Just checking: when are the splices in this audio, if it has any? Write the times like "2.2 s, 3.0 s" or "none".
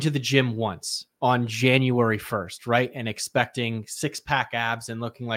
none